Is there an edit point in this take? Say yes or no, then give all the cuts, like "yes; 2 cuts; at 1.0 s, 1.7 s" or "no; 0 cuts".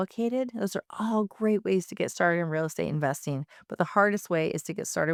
no; 0 cuts